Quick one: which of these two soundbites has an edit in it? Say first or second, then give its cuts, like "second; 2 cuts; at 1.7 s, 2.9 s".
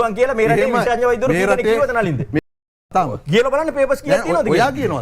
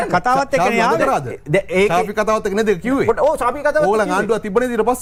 first; 1 cut; at 2.9 s